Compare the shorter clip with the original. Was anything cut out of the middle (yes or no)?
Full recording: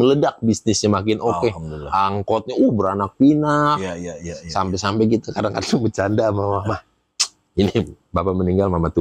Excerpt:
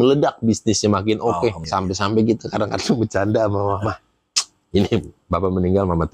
yes